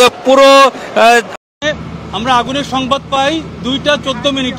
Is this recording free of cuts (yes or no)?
no